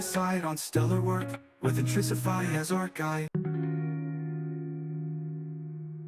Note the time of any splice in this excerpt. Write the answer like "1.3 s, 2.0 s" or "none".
3.3 s